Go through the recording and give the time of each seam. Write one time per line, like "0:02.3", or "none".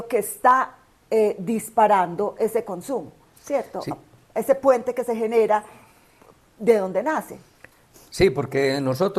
none

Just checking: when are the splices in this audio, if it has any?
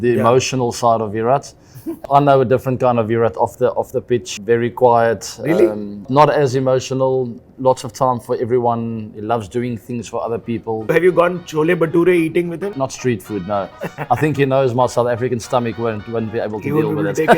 0:02.0
0:04.3
0:10.8
0:12.7

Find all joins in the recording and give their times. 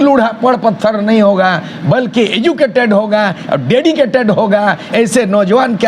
0:04.8

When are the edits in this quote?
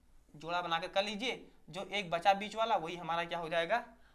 none

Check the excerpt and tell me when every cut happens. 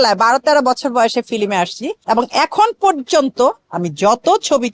0:01.9

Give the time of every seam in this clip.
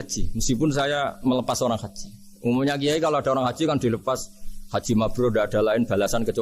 none

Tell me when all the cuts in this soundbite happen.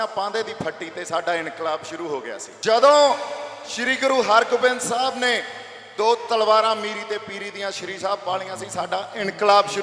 0:02.5

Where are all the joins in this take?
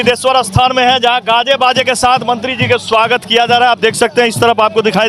none

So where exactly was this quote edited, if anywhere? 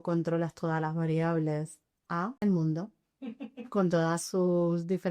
0:02.4

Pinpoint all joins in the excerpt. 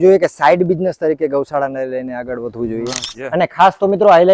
0:03.0

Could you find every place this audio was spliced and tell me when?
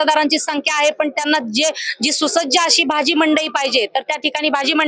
none

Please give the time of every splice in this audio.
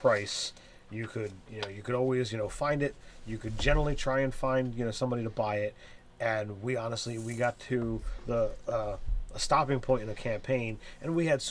0:04.5

